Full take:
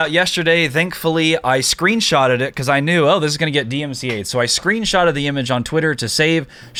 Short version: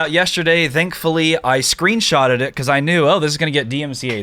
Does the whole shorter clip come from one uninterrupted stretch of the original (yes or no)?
yes